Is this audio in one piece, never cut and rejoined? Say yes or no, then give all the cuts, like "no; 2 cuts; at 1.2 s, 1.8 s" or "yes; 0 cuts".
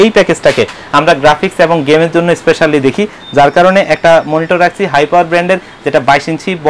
yes; 0 cuts